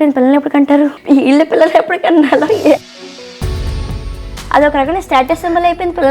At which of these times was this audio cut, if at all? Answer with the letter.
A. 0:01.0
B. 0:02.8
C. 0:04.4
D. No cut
A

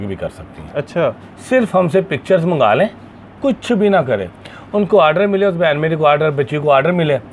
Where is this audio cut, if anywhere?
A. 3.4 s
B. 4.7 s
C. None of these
A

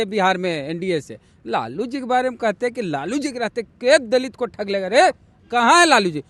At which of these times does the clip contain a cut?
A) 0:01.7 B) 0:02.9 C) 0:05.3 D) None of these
C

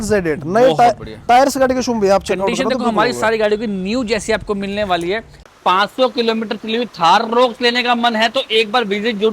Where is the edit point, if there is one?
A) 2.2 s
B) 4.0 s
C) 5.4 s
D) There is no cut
C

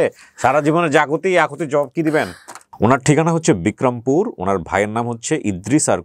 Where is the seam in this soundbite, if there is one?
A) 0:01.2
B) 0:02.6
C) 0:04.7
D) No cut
B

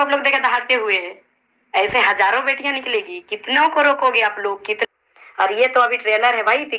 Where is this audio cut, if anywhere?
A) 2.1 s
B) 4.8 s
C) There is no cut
B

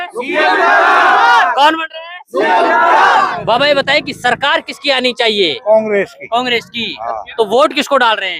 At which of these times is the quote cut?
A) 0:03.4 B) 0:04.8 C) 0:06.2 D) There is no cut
A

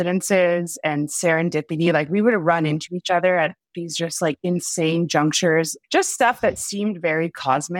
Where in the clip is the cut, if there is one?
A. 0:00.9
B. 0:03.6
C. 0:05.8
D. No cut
C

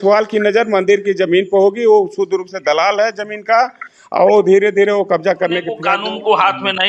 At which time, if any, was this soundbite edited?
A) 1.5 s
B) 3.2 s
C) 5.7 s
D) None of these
C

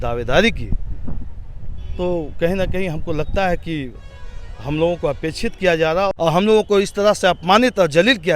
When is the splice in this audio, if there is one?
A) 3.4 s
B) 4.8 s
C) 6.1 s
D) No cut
C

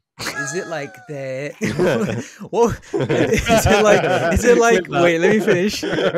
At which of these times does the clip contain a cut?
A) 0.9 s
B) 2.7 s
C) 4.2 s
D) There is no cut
D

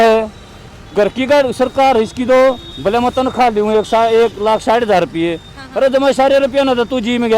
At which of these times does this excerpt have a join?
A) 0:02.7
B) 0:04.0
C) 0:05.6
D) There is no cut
A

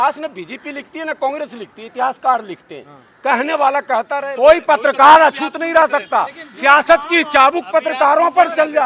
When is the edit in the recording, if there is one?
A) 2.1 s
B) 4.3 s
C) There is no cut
B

